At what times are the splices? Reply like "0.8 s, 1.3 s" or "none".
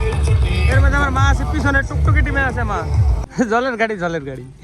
3.2 s